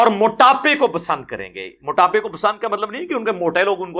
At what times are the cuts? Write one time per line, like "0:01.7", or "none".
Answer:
none